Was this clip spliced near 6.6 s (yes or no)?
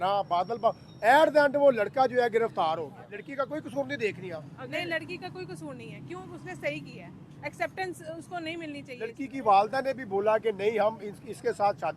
no